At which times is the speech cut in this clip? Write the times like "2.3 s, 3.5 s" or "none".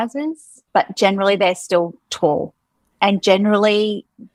none

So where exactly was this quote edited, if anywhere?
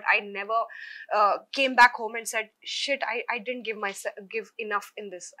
none

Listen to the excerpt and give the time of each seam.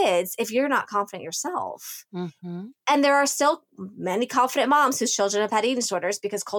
2.4 s

